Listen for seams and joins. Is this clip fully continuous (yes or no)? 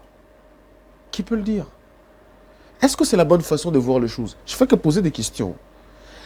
yes